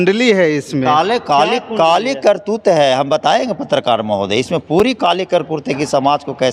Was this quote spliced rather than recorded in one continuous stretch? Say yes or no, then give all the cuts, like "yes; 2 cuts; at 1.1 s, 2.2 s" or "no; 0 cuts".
no; 0 cuts